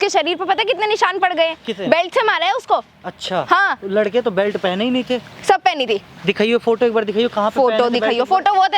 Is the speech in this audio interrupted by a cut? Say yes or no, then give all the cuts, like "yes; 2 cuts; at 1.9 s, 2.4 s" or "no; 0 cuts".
no; 0 cuts